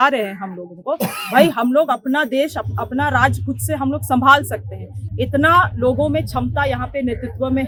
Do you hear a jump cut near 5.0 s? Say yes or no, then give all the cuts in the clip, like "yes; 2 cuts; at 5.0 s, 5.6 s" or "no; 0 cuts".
no; 0 cuts